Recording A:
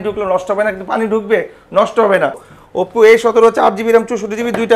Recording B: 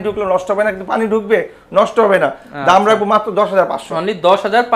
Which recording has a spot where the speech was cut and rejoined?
A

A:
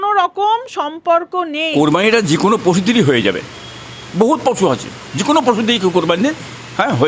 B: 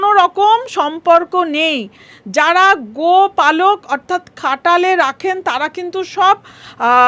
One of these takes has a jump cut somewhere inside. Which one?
B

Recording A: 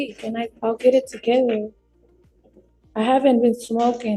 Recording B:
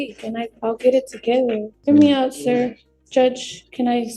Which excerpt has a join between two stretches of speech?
B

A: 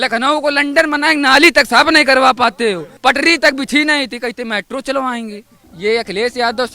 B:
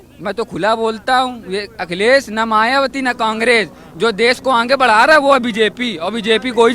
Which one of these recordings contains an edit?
A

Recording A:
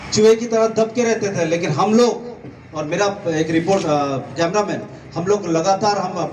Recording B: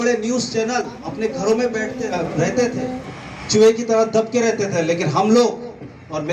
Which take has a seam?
B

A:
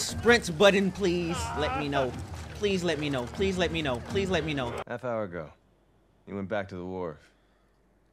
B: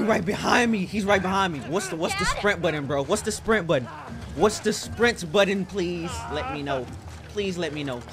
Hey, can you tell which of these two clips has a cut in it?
A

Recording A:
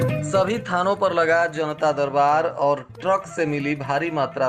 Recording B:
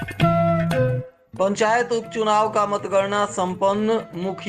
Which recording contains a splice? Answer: B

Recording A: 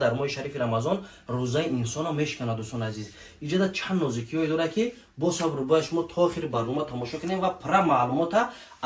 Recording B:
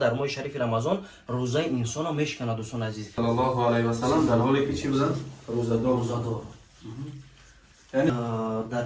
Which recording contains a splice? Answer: B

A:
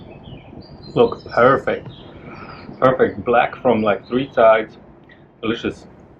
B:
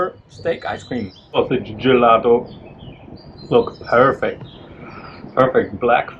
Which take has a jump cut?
B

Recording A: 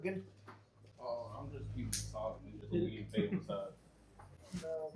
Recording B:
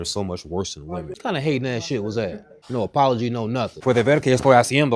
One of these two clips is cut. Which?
B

